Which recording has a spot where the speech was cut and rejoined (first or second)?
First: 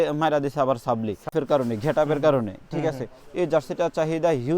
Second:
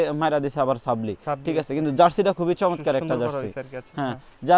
first